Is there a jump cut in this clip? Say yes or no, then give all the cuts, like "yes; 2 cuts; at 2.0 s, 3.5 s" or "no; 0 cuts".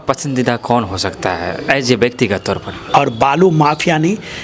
yes; 1 cut; at 2.7 s